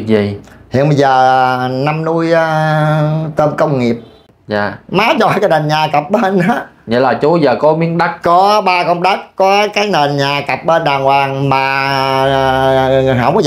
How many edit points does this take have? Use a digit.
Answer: 1